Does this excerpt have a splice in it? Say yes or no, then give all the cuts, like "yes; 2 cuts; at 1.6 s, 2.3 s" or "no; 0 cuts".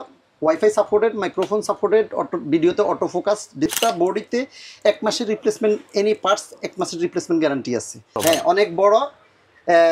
yes; 2 cuts; at 3.7 s, 8.2 s